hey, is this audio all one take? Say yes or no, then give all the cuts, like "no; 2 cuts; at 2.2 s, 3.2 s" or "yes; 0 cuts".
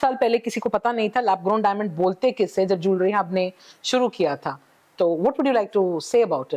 yes; 0 cuts